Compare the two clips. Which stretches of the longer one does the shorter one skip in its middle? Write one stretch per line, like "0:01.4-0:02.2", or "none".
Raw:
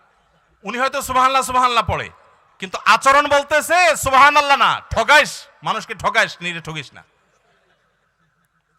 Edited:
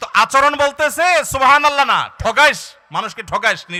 none